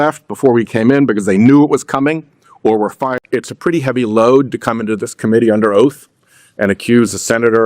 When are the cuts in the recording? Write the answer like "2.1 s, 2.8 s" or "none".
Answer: 3.2 s